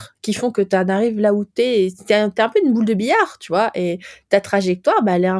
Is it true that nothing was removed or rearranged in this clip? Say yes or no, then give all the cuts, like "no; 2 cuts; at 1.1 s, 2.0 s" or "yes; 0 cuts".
yes; 0 cuts